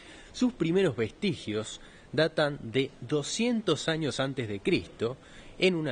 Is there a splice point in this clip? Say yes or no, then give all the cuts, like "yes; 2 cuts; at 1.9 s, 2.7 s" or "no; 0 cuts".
no; 0 cuts